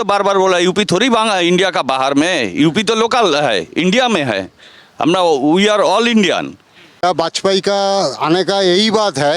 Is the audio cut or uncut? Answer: cut